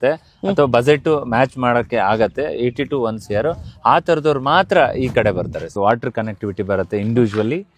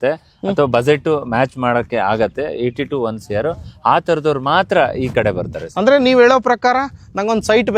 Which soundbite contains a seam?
first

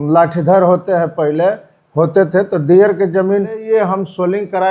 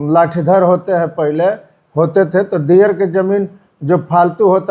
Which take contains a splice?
first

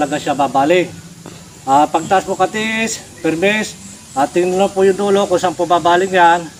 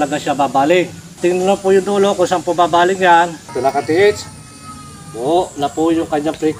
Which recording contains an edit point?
second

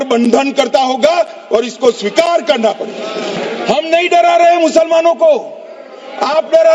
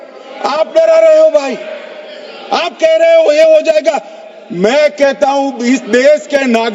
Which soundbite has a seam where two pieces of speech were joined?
first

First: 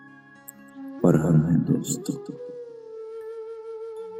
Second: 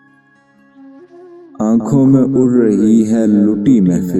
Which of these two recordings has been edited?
second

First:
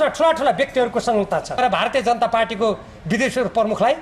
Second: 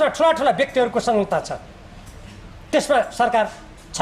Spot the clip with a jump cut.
first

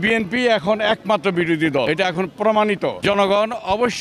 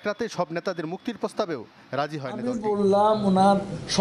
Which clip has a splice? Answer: second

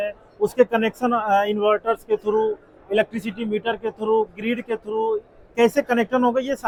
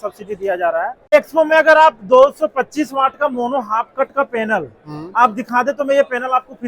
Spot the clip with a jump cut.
second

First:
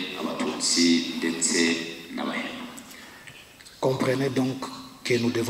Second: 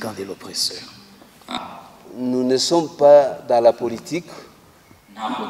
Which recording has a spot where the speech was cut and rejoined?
second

